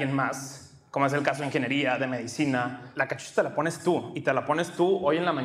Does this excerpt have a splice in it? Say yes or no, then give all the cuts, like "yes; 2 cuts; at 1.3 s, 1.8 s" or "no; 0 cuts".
yes; 1 cut; at 2.8 s